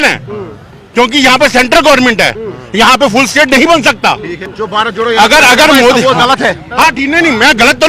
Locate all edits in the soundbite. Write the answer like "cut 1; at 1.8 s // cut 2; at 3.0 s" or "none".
cut 1; at 4.4 s